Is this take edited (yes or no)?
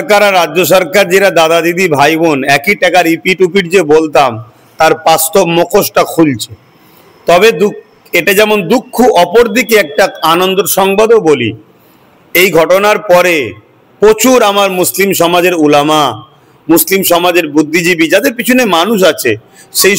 no